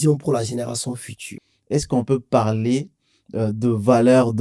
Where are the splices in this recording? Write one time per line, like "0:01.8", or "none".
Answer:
0:01.3